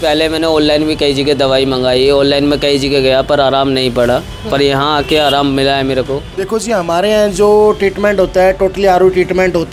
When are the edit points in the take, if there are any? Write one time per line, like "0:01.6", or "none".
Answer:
0:06.3